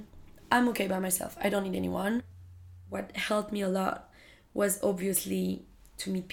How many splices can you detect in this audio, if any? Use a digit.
1